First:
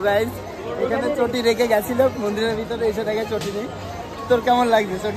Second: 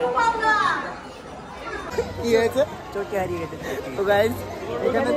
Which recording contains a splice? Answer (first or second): second